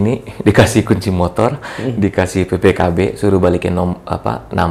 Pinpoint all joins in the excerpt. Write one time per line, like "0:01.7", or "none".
none